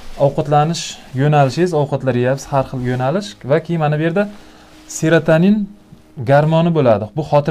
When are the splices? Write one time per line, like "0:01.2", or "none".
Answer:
none

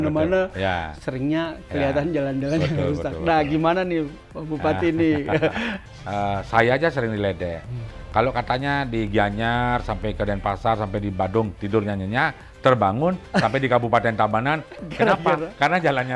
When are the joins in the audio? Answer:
0:05.7

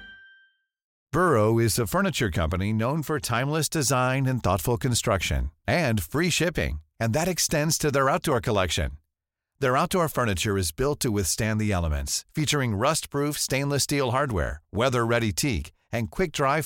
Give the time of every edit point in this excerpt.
0:01.0

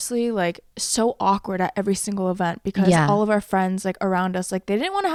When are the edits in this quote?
none

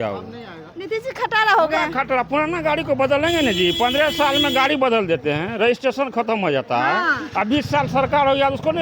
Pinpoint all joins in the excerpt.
none

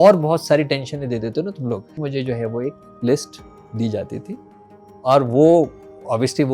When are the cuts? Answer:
0:02.1

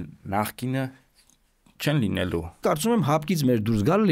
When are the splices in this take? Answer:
0:02.6

